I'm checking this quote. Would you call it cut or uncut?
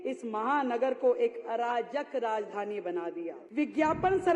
cut